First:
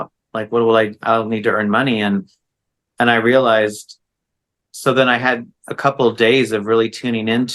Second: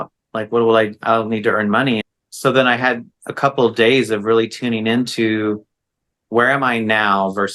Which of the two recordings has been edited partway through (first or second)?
second